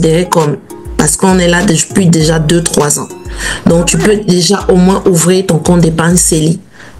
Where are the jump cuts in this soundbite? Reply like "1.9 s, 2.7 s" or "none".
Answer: none